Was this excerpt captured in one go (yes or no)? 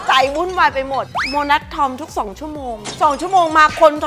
no